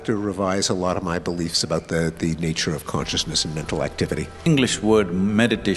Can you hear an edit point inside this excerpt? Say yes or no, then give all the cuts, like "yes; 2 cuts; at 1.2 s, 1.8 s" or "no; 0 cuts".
yes; 1 cut; at 4.5 s